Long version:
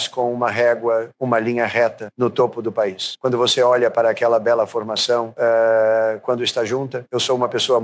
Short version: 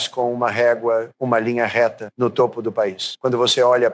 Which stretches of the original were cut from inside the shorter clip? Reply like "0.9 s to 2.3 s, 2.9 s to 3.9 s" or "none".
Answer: none